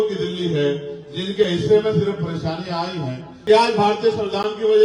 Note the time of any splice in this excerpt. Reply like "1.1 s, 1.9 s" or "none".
3.3 s